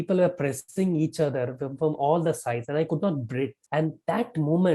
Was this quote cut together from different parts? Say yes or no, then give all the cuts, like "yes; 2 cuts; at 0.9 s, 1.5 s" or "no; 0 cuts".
yes; 1 cut; at 3.6 s